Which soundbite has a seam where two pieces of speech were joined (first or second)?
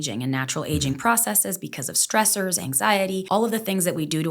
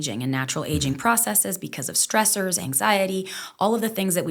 first